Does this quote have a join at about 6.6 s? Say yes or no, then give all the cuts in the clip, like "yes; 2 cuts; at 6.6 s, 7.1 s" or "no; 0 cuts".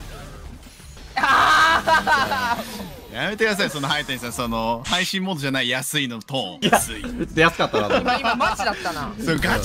yes; 2 cuts; at 1.0 s, 6.6 s